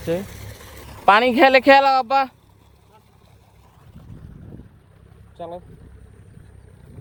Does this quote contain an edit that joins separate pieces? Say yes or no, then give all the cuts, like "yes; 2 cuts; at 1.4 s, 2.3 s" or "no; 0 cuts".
no; 0 cuts